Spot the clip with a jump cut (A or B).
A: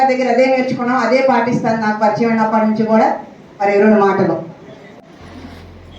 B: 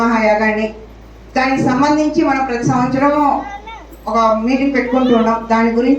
A